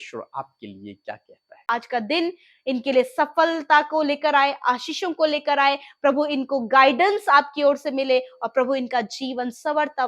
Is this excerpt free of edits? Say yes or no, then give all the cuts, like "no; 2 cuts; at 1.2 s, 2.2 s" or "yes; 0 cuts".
no; 1 cut; at 1.6 s